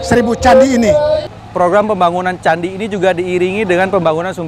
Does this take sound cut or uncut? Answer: cut